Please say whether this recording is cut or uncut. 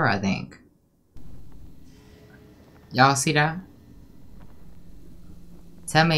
cut